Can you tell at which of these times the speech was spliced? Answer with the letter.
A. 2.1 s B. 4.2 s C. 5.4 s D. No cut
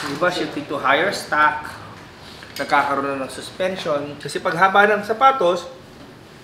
B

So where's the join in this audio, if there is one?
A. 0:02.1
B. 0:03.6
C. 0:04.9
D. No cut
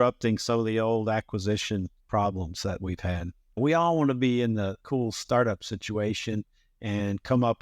B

